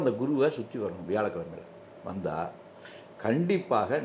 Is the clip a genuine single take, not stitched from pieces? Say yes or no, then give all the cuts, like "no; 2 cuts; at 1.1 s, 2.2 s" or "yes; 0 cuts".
yes; 0 cuts